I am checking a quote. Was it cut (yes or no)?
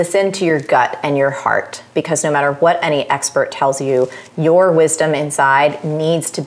no